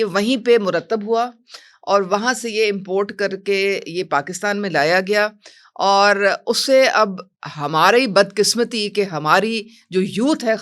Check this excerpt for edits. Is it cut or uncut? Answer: uncut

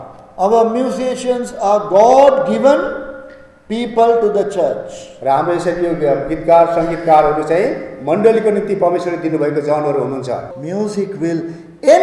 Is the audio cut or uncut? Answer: cut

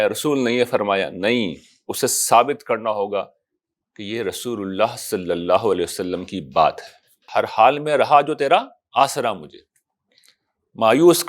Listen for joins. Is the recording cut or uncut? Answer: cut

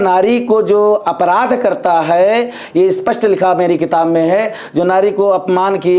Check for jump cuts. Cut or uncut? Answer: uncut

